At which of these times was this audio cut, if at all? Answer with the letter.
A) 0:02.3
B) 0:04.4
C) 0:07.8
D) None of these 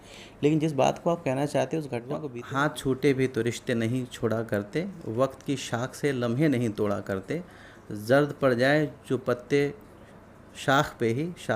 A